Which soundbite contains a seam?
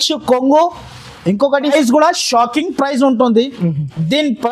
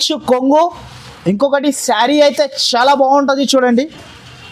first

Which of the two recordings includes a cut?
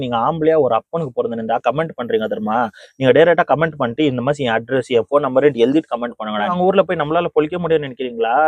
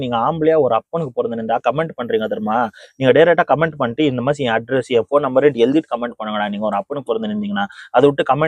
first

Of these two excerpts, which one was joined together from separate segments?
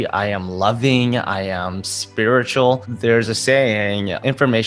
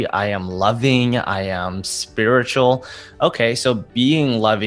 first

